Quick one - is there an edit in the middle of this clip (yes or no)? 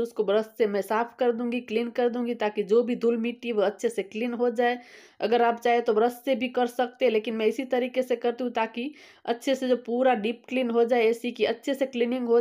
no